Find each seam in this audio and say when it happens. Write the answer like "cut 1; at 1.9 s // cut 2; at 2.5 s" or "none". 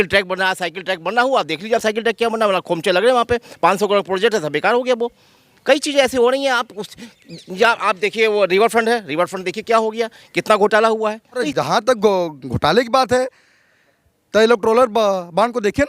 cut 1; at 11.5 s